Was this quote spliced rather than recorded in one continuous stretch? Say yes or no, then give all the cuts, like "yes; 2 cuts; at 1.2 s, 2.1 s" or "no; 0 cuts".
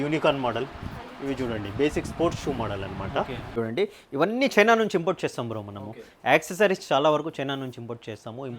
yes; 1 cut; at 3.6 s